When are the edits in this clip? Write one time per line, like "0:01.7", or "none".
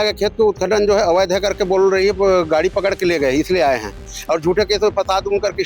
0:04.1